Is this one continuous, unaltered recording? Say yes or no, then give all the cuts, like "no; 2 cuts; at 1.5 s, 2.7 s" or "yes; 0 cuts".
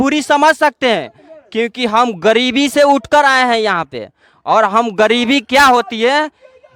yes; 0 cuts